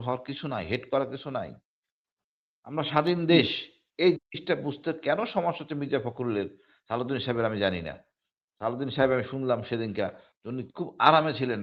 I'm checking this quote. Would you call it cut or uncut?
uncut